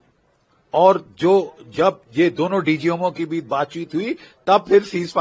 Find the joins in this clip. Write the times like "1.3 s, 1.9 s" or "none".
none